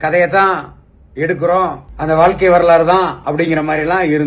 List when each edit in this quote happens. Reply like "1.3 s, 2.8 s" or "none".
1.9 s